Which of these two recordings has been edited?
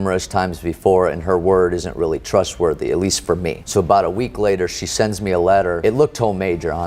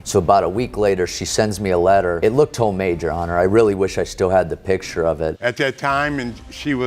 second; 1 cut; at 5.4 s

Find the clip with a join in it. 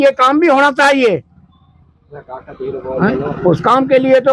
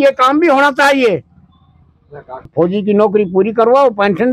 second; 1 cut; at 2.5 s

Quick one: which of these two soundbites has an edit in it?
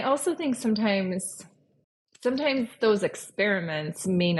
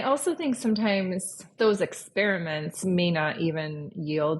second; 1 cut; at 1.5 s

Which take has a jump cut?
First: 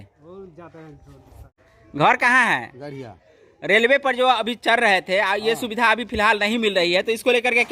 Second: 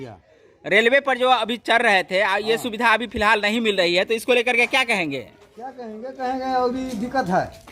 first; 1 cut; at 1.6 s

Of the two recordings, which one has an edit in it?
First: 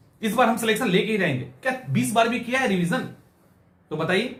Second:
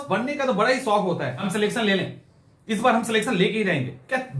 second; 1 cut; at 1.4 s

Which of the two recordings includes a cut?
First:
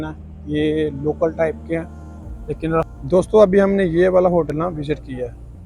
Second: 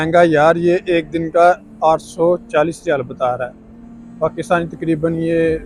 first; 1 cut; at 2.8 s

